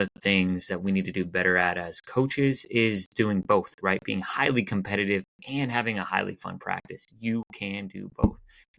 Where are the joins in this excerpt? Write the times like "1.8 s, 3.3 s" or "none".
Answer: none